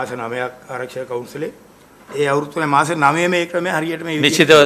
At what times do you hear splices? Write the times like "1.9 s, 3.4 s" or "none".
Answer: none